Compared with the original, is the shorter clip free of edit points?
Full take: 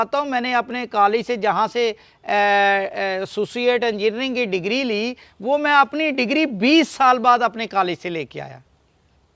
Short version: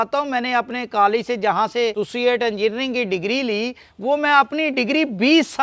no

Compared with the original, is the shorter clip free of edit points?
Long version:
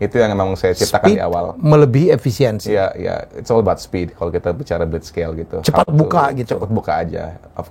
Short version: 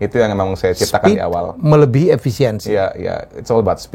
yes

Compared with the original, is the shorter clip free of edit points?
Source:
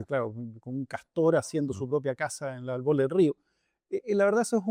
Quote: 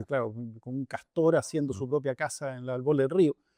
yes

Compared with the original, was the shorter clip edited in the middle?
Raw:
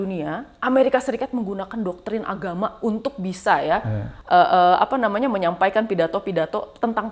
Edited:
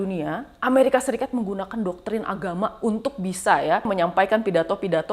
yes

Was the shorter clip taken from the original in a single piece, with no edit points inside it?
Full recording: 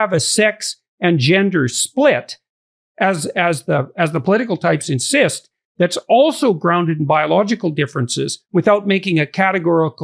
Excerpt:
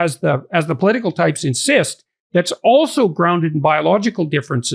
yes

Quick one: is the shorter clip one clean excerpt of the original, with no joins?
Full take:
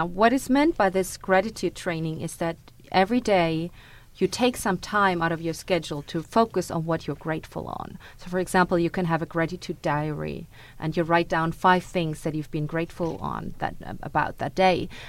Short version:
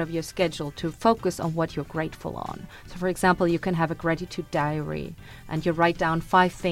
yes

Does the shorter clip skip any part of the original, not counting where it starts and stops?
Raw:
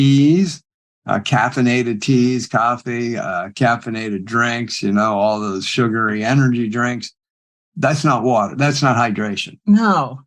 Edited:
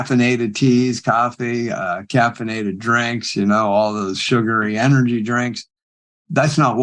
no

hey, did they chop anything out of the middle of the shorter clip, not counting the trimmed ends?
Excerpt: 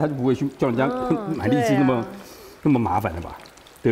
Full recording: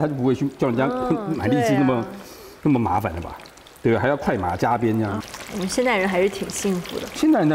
no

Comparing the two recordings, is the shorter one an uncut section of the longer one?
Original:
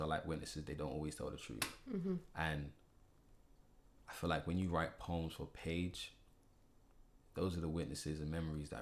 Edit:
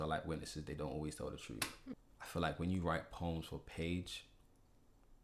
no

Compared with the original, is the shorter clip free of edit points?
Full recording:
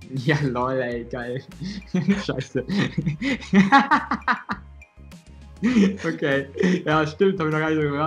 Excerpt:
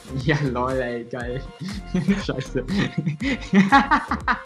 yes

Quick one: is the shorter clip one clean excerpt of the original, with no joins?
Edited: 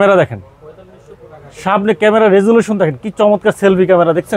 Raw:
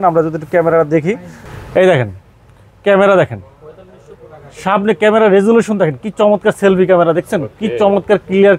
yes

